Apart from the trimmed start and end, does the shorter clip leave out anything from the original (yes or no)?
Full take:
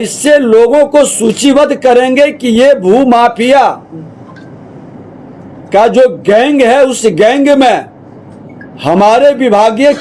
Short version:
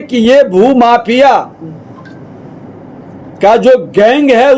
no